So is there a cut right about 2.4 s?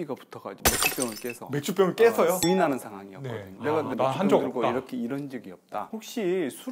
yes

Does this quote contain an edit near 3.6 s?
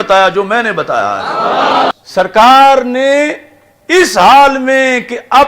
no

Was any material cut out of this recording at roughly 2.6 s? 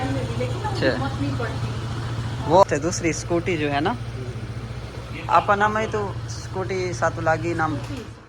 yes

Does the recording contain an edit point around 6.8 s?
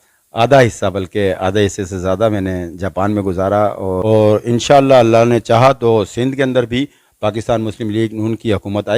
no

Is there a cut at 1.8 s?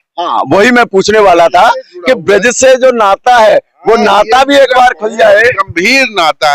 no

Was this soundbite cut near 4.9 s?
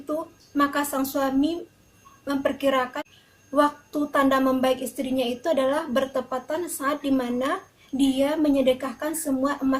no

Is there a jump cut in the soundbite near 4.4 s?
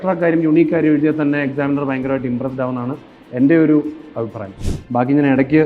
yes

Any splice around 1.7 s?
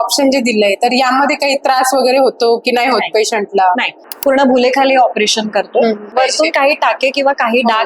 no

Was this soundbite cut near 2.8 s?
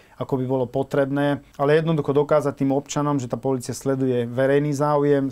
no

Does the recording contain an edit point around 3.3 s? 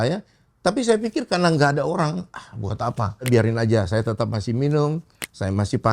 yes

